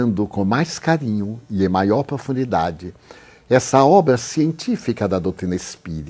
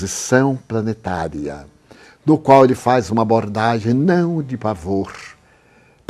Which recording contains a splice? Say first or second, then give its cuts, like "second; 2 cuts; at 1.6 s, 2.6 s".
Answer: first; 1 cut; at 2.0 s